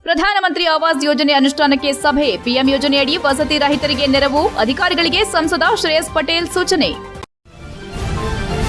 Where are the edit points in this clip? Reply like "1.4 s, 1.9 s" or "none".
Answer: 7.1 s

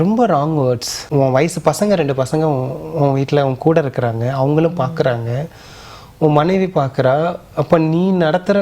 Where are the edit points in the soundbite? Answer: 0.9 s

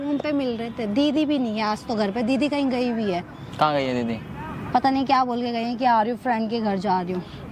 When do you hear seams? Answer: none

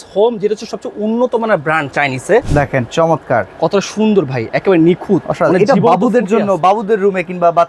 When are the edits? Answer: 2.5 s

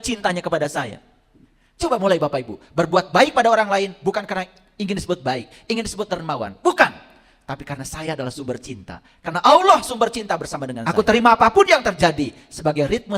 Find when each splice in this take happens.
10.9 s

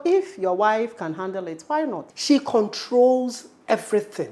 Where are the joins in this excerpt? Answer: 2.1 s

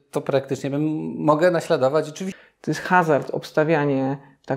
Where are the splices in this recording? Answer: 2.2 s

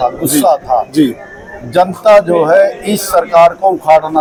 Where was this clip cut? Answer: none

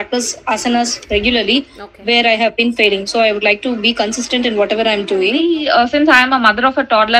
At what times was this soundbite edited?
5.4 s

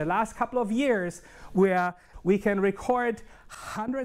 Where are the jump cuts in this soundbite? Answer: 2.1 s

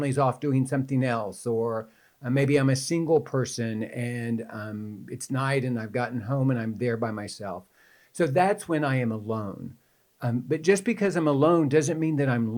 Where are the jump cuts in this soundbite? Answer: none

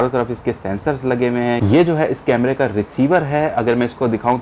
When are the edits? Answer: 1.6 s

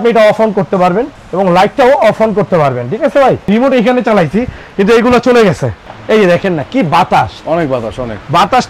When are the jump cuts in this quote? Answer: 1.2 s, 3.5 s, 5.9 s

